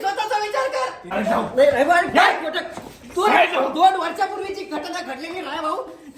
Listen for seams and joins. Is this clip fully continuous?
no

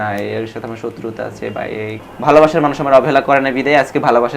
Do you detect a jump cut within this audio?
yes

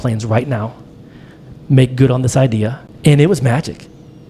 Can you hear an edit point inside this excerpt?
yes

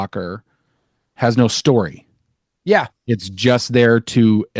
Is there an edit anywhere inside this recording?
no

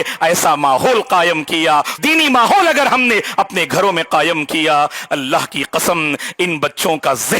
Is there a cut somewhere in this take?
yes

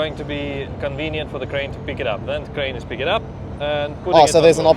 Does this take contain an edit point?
no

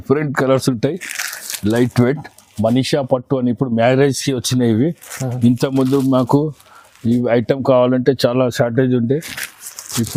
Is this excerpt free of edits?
yes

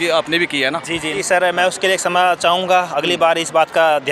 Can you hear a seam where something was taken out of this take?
yes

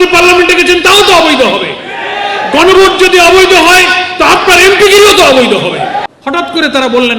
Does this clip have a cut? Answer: yes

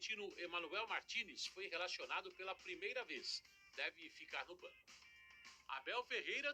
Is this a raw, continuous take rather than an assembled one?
yes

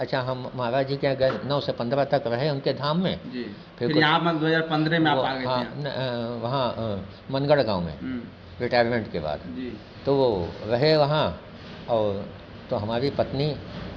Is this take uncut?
yes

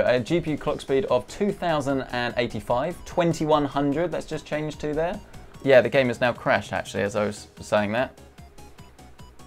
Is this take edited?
no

